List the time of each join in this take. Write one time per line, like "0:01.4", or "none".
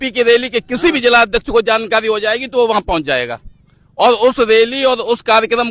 none